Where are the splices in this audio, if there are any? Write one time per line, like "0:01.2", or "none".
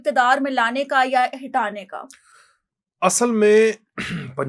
none